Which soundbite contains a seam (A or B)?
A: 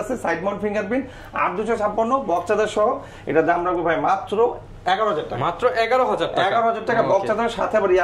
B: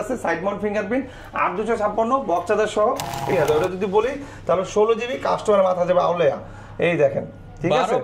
B